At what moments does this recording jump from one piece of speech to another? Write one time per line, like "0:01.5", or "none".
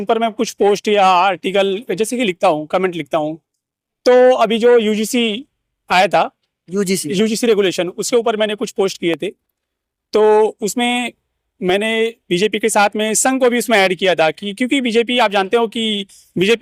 none